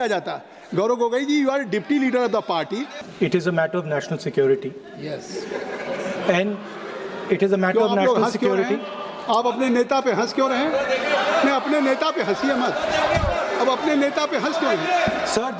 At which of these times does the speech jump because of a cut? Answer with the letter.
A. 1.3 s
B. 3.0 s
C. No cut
B